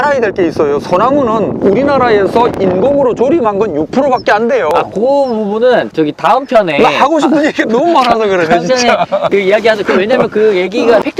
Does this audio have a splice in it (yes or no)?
no